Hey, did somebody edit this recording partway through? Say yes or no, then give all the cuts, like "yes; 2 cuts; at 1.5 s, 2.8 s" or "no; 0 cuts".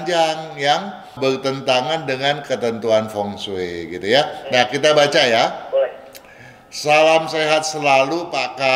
no; 0 cuts